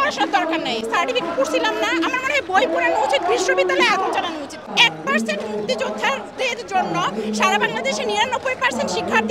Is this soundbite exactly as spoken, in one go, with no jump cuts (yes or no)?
yes